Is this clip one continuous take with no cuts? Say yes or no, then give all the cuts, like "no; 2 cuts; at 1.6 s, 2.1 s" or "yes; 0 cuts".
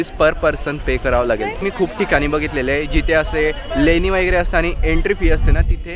yes; 0 cuts